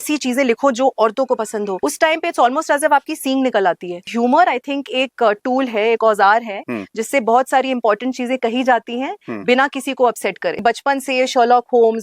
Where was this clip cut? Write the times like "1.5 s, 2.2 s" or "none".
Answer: 1.8 s, 4.1 s, 10.6 s